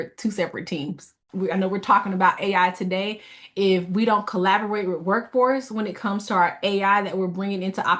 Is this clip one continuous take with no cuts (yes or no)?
no